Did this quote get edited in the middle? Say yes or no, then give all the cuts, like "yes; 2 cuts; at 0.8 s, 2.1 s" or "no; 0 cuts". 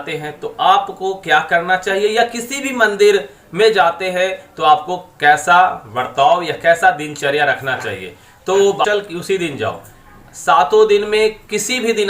yes; 1 cut; at 8.8 s